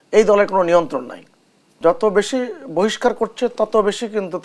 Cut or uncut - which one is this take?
cut